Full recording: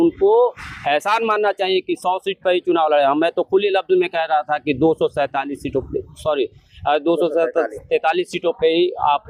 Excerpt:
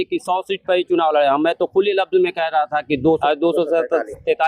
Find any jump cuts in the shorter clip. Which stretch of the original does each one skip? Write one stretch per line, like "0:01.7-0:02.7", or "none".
0:05.0-0:06.8